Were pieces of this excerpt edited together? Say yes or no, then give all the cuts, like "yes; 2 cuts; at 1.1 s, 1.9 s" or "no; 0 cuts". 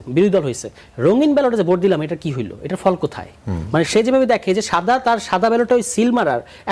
no; 0 cuts